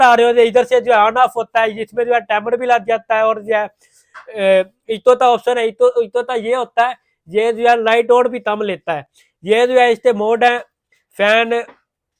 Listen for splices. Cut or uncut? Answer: uncut